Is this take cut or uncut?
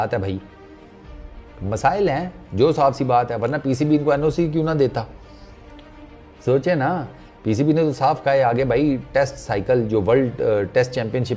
uncut